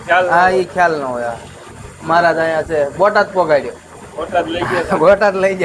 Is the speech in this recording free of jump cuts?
no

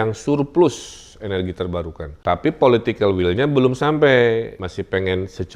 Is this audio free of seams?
no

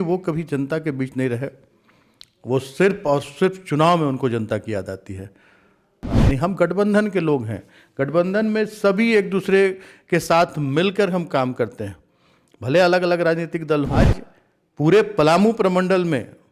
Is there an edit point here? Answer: yes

